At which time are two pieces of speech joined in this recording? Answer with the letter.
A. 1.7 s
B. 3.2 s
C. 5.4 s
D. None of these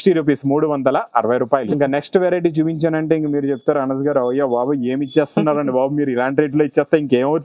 A